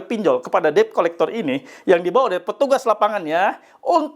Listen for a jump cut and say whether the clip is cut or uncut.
uncut